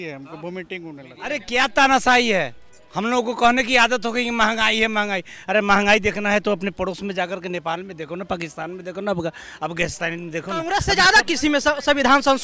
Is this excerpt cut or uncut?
cut